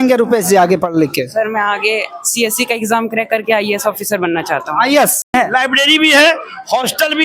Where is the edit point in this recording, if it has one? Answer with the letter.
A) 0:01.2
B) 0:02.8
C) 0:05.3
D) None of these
C